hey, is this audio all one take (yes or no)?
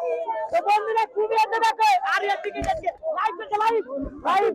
no